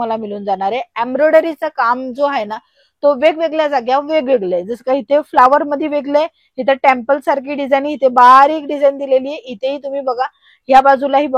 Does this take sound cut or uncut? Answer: uncut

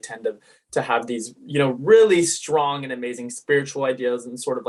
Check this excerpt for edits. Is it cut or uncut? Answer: uncut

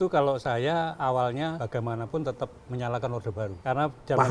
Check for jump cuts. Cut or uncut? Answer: uncut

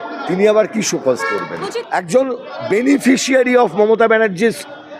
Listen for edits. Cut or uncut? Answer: cut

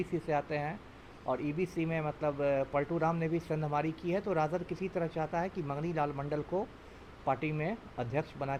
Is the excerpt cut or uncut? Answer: uncut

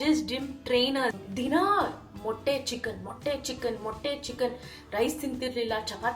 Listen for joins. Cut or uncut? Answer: cut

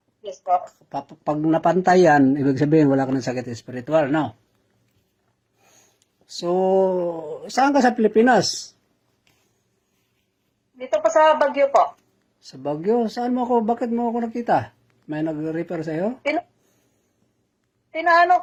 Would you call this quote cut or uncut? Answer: uncut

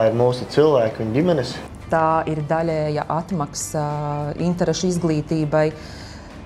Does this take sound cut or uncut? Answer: cut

